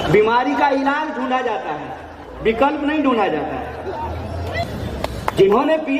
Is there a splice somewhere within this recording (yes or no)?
yes